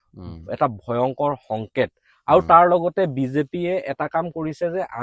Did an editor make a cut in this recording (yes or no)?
no